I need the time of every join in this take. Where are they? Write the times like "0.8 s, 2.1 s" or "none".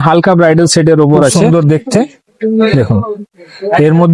1.4 s